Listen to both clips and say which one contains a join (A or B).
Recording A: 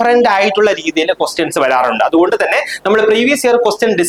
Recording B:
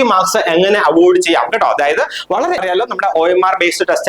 B